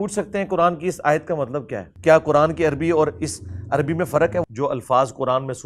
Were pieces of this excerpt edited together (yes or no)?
yes